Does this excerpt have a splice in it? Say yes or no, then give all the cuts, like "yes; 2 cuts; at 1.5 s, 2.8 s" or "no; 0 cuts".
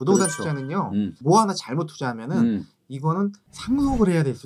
yes; 1 cut; at 1.2 s